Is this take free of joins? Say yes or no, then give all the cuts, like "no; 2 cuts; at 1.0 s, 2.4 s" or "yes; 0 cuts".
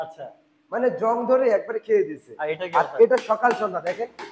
yes; 0 cuts